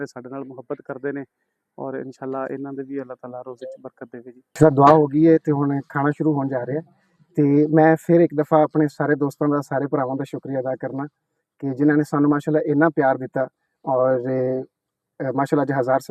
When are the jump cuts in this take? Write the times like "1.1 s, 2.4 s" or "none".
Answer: 4.6 s